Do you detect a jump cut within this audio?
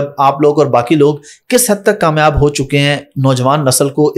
no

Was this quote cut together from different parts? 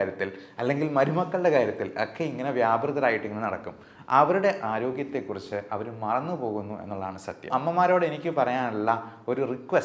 yes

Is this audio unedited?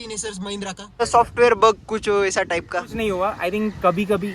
no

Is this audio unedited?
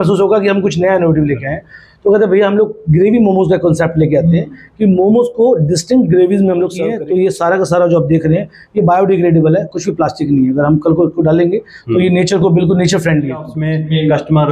no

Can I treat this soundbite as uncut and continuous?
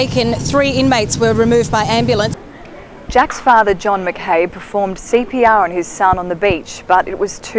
no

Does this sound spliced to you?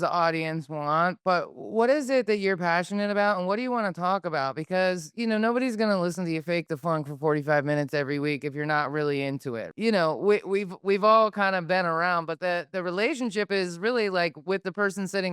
yes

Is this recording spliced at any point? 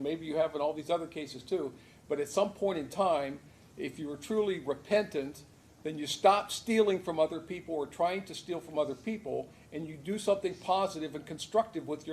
no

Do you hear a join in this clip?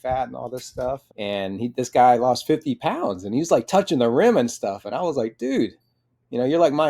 yes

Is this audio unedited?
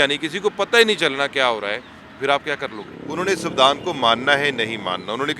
no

